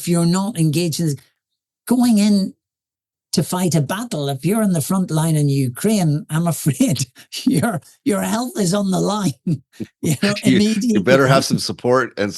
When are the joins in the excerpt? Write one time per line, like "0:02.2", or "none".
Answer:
0:11.0